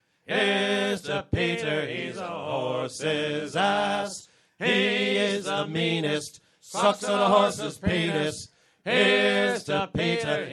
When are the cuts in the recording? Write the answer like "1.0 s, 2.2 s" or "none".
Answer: none